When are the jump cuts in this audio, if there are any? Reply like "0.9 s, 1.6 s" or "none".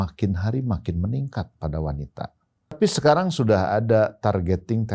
2.8 s